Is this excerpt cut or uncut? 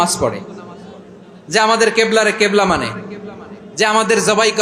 uncut